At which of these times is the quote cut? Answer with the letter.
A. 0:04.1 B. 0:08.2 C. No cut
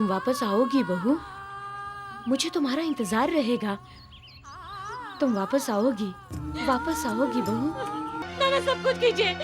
B